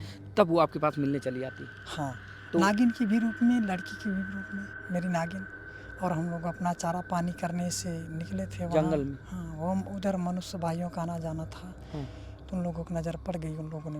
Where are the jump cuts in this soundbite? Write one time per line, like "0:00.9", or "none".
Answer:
0:04.8